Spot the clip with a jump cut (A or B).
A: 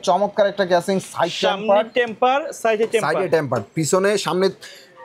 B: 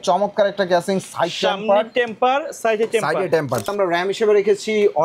B